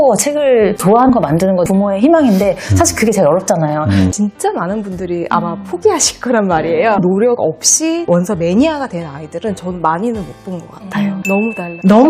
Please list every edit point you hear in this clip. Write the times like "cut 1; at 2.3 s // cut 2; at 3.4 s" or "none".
cut 1; at 4.1 s // cut 2; at 7.0 s // cut 3; at 11.2 s